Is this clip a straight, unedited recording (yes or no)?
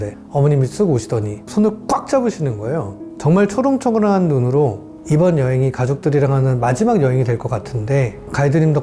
no